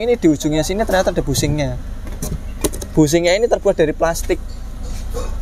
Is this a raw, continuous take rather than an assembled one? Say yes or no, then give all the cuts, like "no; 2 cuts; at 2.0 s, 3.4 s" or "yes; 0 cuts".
yes; 0 cuts